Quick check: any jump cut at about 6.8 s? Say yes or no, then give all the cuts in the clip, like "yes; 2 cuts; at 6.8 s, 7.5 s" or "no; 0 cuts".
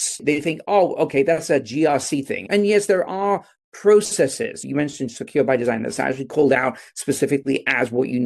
no; 2 cuts; at 2.4 s, 4.6 s